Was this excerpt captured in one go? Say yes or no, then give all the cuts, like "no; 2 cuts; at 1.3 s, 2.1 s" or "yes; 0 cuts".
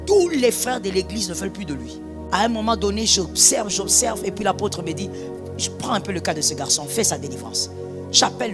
no; 1 cut; at 2.3 s